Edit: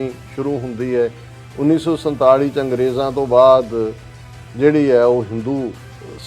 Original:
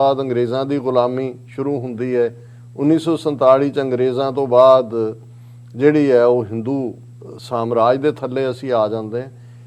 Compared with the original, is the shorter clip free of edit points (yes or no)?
yes